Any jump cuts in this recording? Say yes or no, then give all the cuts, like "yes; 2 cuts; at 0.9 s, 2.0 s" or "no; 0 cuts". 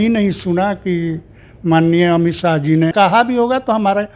yes; 1 cut; at 2.9 s